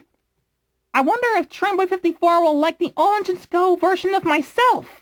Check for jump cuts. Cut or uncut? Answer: uncut